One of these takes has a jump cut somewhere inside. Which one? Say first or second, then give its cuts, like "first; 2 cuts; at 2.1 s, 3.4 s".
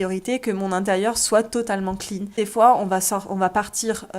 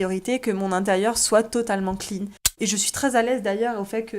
second; 1 cut; at 2.3 s